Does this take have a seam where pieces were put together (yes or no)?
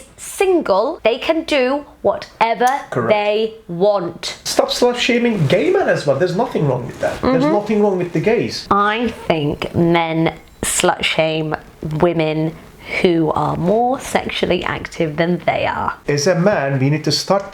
yes